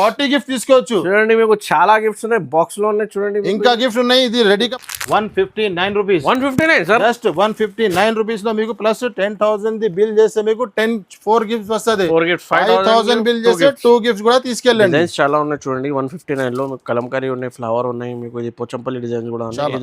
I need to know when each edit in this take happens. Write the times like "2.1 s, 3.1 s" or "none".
4.7 s

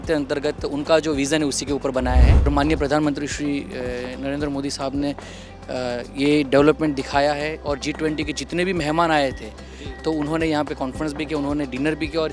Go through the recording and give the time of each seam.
2.5 s

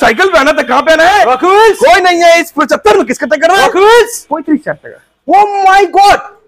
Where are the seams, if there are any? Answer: none

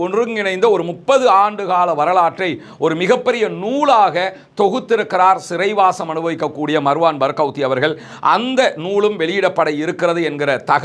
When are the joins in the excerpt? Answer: none

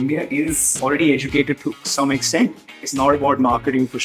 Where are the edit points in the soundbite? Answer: 0.8 s, 2.8 s

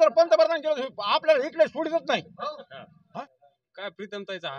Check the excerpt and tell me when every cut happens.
3.2 s

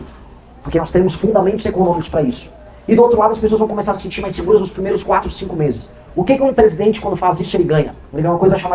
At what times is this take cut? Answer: none

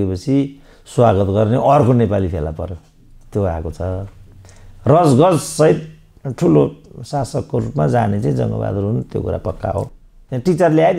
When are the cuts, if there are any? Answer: 9.9 s

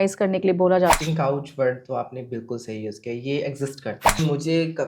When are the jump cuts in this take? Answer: 1.0 s, 4.2 s

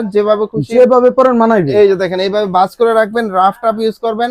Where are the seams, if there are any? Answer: none

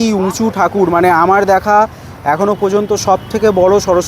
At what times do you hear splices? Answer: none

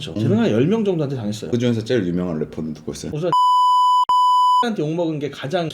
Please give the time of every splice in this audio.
3.0 s

